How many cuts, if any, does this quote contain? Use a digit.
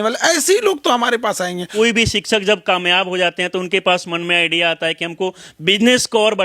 1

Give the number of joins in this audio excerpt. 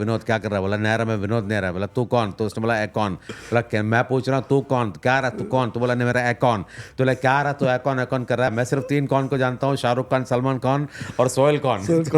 1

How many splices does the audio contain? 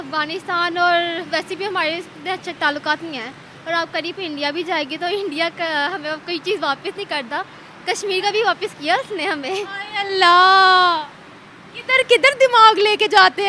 0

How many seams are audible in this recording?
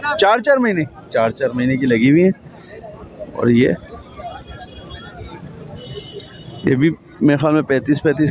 0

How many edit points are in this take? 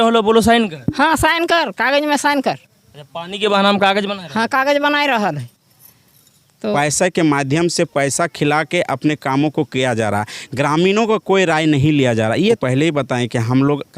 2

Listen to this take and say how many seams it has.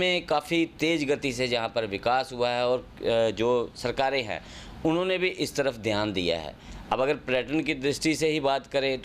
0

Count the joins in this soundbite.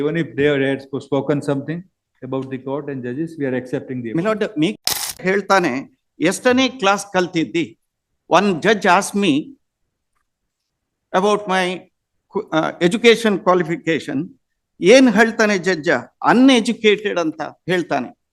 1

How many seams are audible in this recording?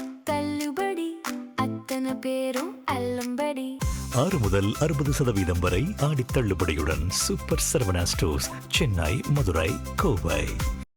0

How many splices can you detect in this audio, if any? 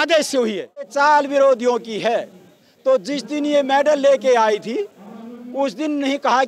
1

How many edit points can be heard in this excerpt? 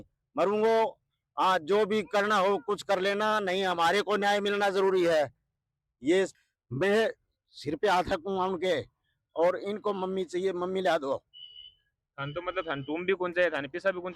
1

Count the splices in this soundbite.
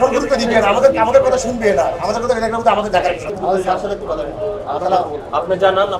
1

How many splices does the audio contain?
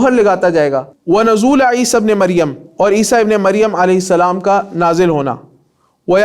1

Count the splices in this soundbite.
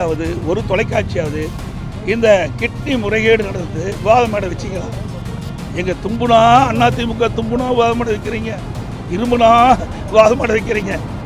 0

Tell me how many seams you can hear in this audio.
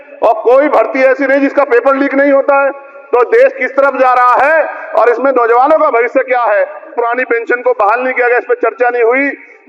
1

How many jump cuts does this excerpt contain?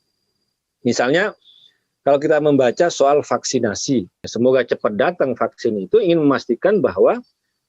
1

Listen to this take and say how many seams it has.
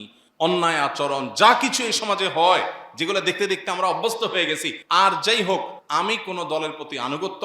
2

